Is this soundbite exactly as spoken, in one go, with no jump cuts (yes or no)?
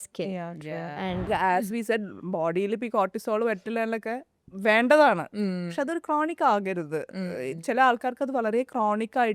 no